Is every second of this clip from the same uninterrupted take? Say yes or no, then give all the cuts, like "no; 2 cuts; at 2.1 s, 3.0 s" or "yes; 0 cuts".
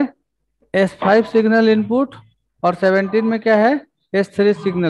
yes; 0 cuts